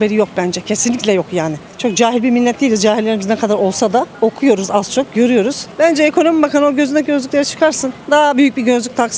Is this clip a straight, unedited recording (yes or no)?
yes